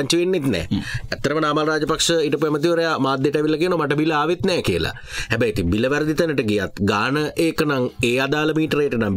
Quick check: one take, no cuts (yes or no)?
yes